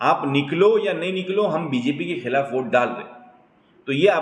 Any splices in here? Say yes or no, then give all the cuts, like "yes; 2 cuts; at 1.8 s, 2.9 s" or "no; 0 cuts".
no; 0 cuts